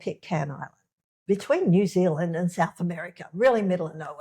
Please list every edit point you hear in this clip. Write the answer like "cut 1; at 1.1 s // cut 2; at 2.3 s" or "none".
cut 1; at 1.1 s